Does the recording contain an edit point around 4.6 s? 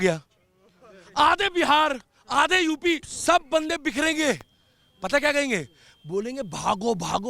no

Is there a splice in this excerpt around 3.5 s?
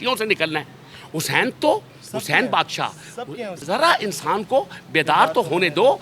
yes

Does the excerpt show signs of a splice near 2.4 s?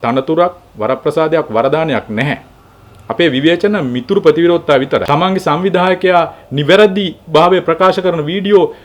no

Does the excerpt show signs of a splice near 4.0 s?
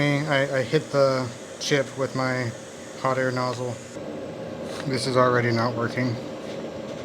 yes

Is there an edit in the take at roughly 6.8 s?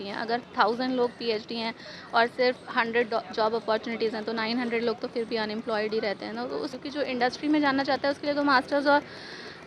yes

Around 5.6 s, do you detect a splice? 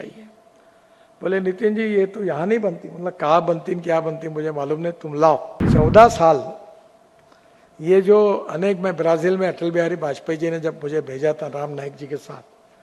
yes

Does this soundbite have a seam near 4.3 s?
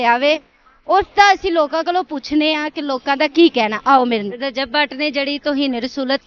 yes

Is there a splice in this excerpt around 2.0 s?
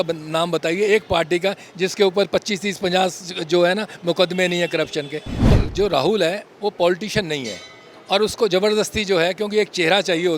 no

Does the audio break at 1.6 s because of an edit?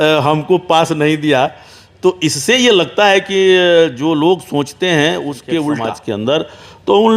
no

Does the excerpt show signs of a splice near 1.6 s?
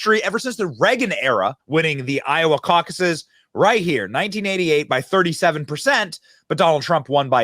yes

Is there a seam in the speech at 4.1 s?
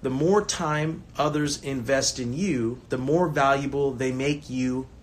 no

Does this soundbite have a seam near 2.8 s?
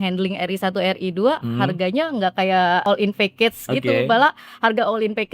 yes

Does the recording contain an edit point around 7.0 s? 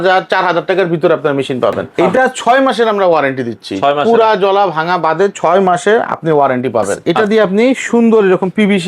yes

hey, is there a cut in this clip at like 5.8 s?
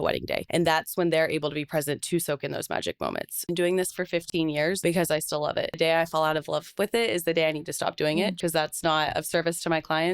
yes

